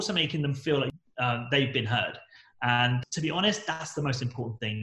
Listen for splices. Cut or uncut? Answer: cut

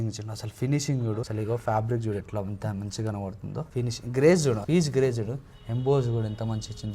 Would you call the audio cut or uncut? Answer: cut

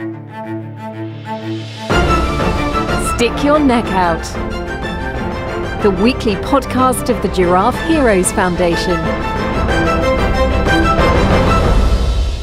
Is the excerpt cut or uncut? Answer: uncut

